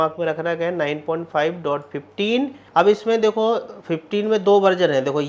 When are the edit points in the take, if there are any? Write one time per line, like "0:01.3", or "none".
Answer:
0:02.6

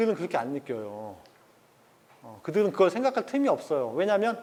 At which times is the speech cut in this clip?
none

